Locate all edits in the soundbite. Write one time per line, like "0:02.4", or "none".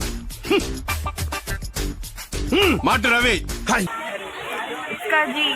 0:03.9